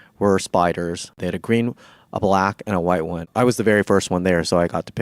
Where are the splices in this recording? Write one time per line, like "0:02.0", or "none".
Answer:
0:01.2
0:03.3